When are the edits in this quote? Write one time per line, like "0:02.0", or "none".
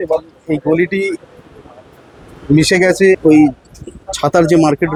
none